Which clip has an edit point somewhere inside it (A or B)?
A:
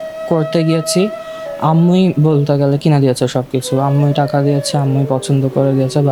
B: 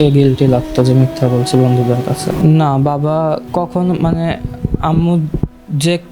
B